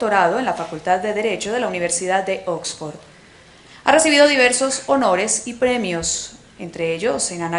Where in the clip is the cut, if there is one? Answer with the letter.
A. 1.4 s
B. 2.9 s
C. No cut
A